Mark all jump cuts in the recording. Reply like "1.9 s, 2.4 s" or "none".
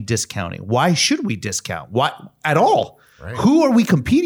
none